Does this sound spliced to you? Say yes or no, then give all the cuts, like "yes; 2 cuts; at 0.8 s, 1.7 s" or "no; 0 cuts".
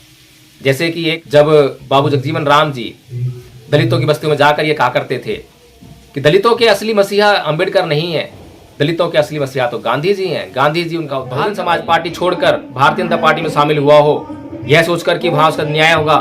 yes; 2 cuts; at 1.2 s, 11.2 s